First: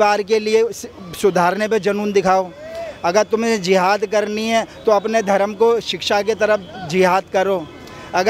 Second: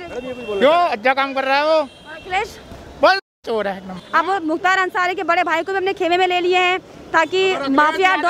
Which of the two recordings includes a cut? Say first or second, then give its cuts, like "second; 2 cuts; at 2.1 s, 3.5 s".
second; 1 cut; at 4.0 s